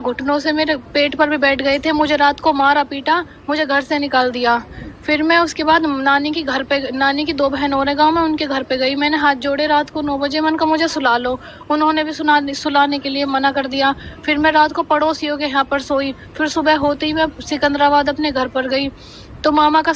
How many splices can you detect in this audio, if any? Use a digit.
0